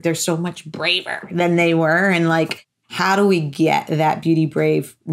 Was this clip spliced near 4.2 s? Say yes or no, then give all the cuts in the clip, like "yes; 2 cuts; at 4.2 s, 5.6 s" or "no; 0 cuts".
no; 1 cut; at 2.8 s